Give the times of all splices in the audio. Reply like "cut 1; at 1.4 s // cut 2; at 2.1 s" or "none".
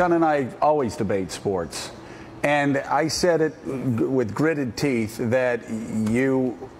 cut 1; at 2.3 s